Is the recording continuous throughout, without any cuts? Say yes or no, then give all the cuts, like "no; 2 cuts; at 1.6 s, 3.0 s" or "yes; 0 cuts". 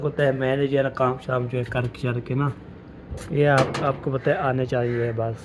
yes; 0 cuts